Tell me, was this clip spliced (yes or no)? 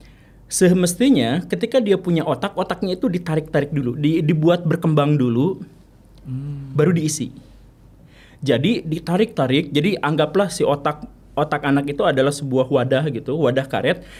no